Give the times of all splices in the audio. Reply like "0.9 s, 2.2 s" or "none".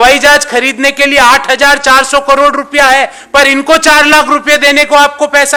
none